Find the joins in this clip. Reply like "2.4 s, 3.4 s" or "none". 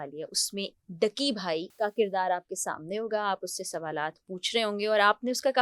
1.7 s